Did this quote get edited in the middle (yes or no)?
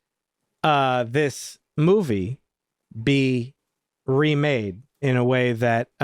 no